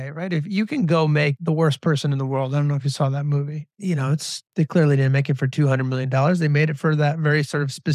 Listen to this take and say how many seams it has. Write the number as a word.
two